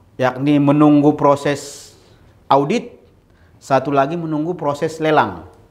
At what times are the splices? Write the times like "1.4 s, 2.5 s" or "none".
none

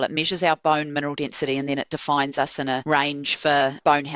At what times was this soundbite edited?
2.8 s

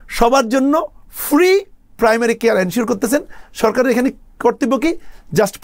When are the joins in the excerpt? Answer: none

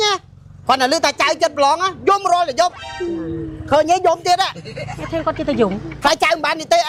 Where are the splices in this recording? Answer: none

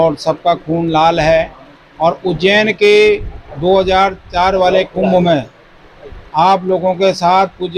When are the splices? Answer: none

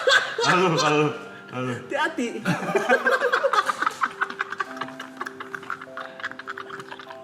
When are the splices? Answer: none

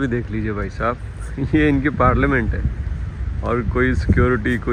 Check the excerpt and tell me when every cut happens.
none

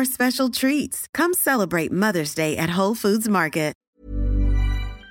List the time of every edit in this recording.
3.8 s

